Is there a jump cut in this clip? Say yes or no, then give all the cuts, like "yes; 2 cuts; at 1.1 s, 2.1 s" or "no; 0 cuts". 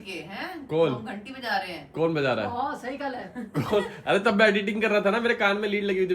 no; 0 cuts